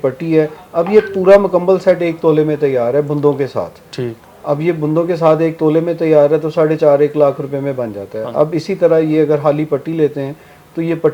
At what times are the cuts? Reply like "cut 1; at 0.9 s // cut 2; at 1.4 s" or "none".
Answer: none